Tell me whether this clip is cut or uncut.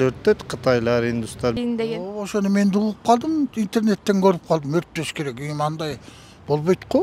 cut